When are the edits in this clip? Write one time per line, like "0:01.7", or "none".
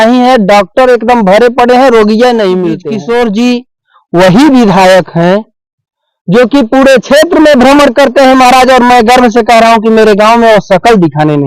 0:02.8